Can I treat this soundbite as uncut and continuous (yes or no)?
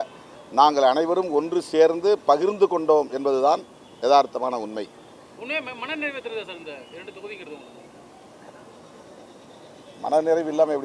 yes